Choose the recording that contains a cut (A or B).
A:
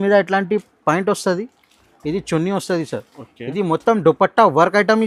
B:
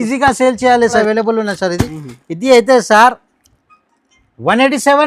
B